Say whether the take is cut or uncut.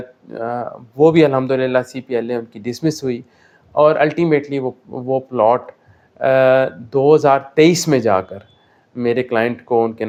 uncut